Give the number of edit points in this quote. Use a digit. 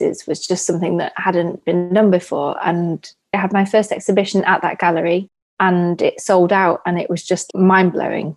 2